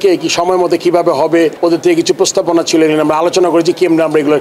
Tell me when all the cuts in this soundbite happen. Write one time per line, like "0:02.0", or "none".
0:01.6